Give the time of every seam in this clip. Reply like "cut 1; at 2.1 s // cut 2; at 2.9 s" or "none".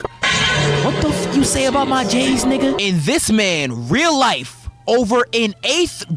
none